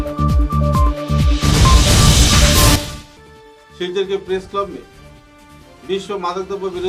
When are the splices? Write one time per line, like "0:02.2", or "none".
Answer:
none